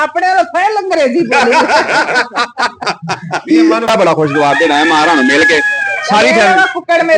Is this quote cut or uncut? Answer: cut